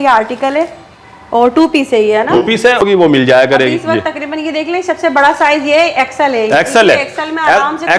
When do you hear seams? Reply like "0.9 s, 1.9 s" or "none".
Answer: 2.8 s